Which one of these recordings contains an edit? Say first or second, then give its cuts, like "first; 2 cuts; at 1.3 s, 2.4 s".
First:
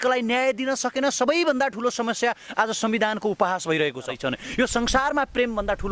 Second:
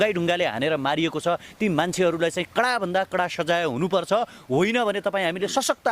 first; 1 cut; at 4.1 s